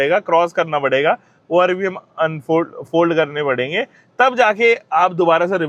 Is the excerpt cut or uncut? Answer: uncut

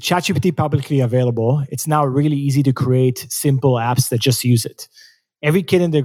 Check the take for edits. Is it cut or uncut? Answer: uncut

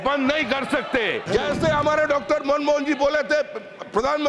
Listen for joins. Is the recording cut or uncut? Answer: cut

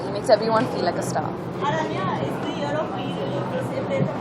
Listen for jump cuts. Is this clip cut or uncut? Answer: uncut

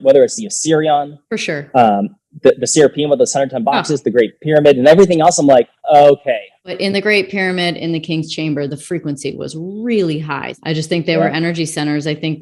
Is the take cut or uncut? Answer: cut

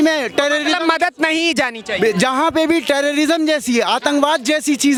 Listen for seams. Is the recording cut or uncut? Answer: uncut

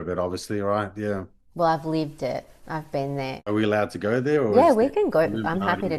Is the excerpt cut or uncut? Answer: cut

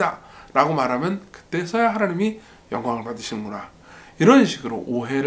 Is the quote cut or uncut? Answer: uncut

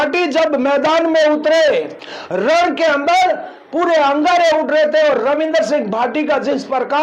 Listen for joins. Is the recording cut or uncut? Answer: cut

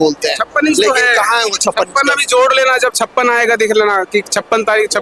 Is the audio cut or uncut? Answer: uncut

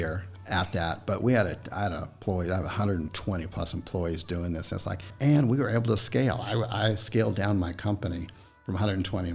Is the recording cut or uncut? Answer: cut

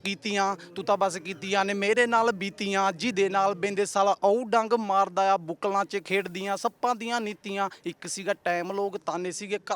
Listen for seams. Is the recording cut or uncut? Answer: uncut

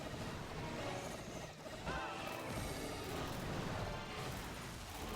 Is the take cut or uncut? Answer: cut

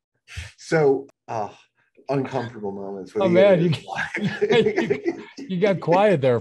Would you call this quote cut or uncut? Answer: cut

